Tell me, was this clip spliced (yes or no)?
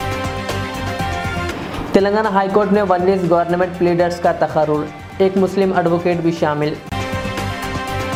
no